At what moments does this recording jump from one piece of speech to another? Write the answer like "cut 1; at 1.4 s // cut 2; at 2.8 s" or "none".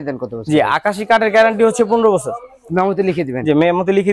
none